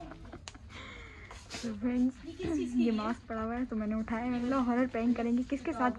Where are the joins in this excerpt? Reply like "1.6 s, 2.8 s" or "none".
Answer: none